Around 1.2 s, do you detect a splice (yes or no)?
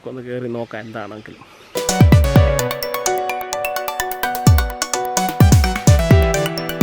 no